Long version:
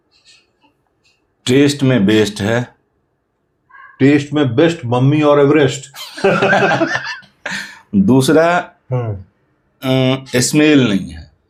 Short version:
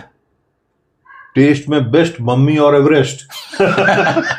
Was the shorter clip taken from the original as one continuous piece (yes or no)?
yes